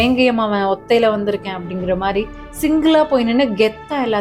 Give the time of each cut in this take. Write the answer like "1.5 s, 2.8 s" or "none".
none